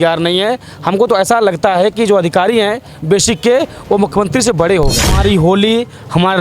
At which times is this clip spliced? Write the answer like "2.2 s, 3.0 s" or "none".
5.2 s